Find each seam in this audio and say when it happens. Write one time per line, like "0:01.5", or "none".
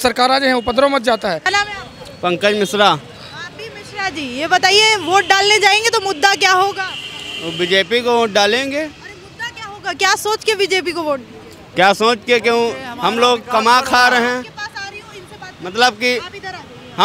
0:01.5